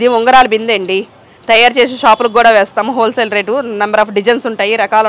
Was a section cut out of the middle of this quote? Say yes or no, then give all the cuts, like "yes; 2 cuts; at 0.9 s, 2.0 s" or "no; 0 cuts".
no; 0 cuts